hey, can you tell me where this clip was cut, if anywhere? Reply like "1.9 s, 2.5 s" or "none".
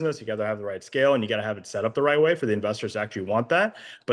none